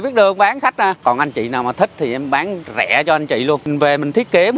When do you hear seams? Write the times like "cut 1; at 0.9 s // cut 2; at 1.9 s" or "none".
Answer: cut 1; at 1.0 s // cut 2; at 3.7 s